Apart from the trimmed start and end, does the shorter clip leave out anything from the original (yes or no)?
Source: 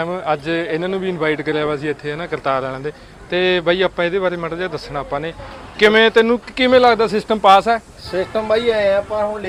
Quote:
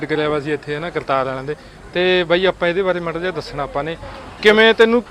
no